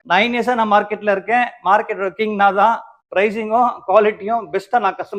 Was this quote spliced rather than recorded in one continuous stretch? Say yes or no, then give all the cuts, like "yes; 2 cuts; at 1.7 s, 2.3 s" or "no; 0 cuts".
no; 0 cuts